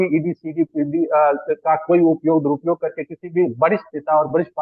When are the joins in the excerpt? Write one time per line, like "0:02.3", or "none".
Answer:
none